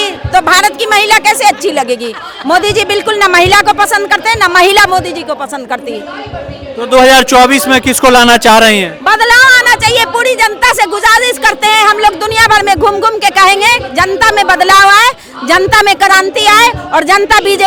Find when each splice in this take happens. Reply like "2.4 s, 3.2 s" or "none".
none